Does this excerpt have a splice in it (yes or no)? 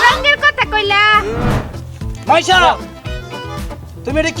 yes